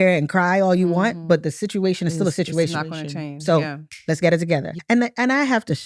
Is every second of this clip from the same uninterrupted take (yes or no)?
no